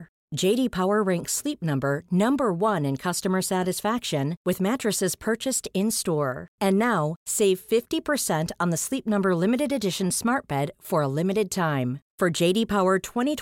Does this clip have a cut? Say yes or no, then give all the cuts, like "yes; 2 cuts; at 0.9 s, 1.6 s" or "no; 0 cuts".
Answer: no; 0 cuts